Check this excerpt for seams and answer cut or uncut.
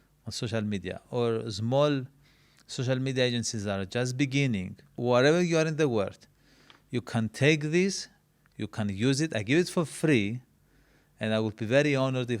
cut